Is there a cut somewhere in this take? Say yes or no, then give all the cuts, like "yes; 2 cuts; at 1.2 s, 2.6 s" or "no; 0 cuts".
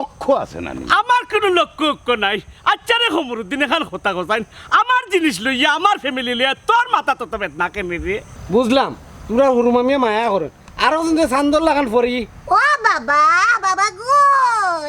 yes; 1 cut; at 8.3 s